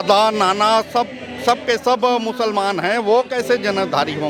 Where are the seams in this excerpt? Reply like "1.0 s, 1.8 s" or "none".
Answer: none